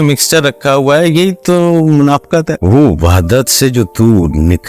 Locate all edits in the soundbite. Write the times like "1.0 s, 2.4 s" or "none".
2.5 s

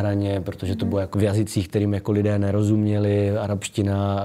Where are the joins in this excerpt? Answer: 1.1 s

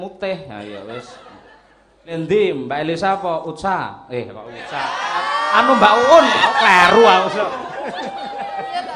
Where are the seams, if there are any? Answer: 2.1 s

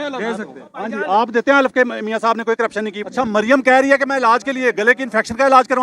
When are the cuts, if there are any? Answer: 3.0 s

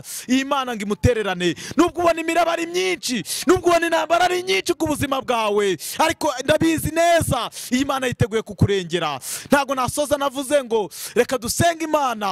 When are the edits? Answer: none

